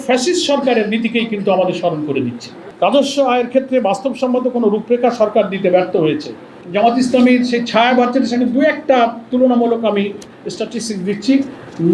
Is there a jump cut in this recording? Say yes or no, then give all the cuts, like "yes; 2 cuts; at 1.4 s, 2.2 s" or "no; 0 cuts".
no; 0 cuts